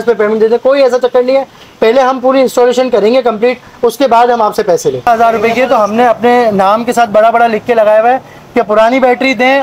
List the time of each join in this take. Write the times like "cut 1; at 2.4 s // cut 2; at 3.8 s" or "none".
cut 1; at 5.1 s